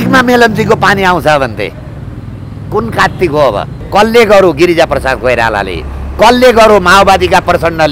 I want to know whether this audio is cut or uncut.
cut